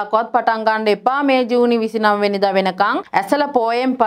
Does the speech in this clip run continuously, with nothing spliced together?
no; 1 cut; at 3.0 s

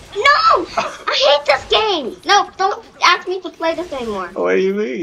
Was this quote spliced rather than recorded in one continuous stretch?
no; 0 cuts

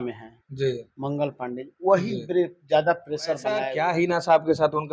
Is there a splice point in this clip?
yes; 1 cut; at 3.7 s

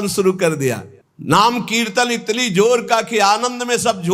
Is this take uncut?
yes; 0 cuts

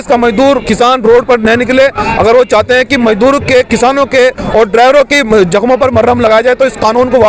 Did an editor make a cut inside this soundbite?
no; 0 cuts

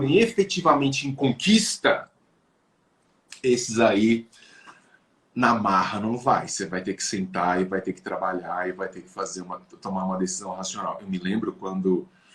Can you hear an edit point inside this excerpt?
no; 0 cuts

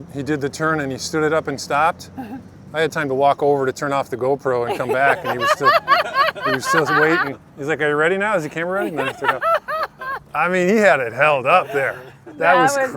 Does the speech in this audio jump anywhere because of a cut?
no; 0 cuts

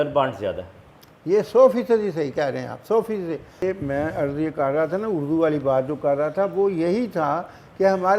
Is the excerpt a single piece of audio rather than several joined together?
no; 1 cut; at 3.6 s

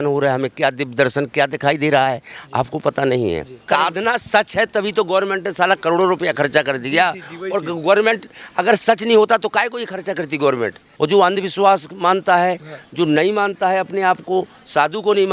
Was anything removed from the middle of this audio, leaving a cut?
yes; 2 cuts; at 3.7 s, 10.8 s

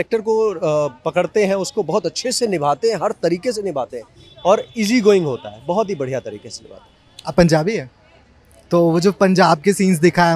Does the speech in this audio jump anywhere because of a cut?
no; 0 cuts

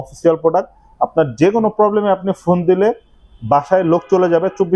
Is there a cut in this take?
no; 0 cuts

